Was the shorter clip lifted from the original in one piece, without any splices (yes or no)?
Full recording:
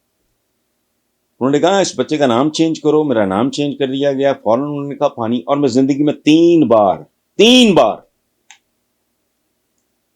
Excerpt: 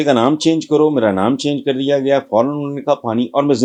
yes